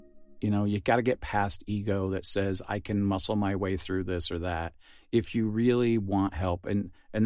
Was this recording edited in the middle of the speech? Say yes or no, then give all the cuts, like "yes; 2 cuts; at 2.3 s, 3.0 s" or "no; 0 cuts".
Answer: no; 0 cuts